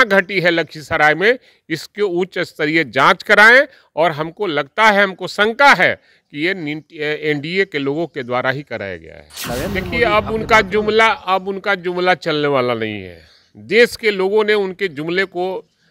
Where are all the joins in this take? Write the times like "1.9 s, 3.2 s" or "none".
9.4 s